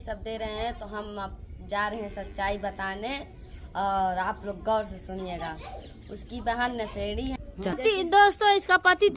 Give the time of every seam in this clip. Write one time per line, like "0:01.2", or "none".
0:07.8